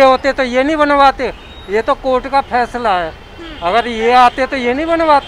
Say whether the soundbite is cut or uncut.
uncut